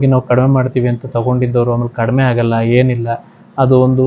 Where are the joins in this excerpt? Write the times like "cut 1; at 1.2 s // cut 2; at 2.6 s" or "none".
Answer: none